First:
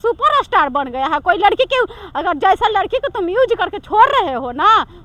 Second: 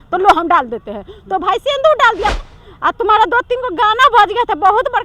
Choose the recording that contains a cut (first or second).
second